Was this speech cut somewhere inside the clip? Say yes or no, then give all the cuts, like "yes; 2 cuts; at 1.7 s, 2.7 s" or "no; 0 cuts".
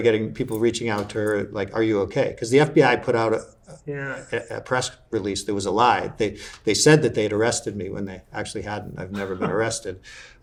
no; 0 cuts